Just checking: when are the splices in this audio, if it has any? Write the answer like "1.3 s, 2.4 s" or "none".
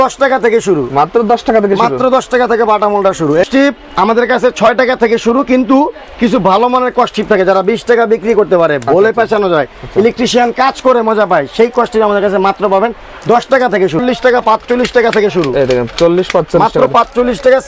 3.4 s, 14.0 s